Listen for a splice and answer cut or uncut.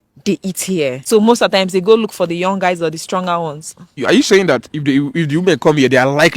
cut